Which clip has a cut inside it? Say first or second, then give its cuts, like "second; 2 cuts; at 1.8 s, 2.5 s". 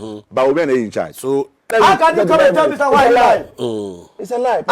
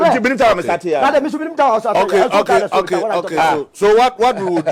first; 1 cut; at 1.7 s